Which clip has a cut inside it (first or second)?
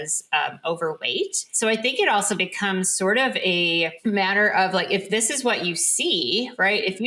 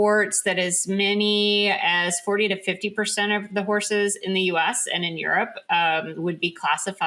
first